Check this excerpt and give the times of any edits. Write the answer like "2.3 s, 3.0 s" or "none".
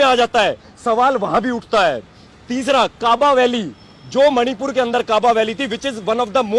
none